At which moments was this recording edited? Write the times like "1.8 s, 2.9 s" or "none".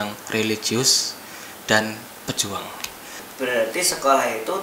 3.2 s